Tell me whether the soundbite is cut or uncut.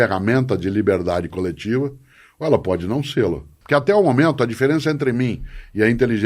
cut